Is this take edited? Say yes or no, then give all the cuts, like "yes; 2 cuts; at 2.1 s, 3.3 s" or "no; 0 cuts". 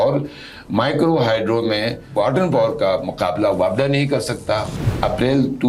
yes; 1 cut; at 4.7 s